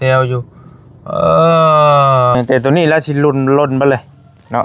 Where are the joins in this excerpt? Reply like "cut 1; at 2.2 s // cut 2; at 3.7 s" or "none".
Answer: cut 1; at 2.4 s